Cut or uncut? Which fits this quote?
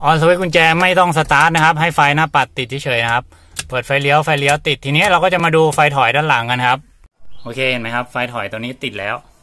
uncut